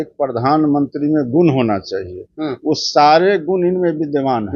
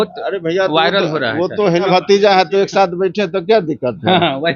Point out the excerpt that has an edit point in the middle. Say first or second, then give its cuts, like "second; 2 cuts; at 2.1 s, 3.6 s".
second; 1 cut; at 1.9 s